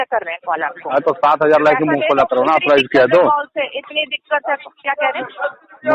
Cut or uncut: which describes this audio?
uncut